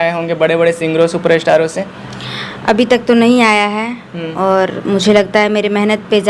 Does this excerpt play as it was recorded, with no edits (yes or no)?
yes